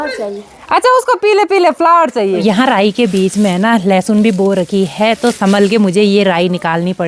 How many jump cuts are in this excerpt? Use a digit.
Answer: 1